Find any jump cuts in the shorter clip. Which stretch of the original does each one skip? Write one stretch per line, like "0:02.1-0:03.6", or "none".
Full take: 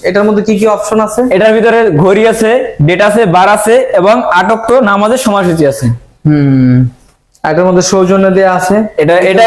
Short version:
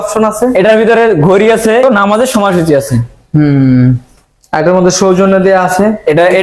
0:02.6-0:04.7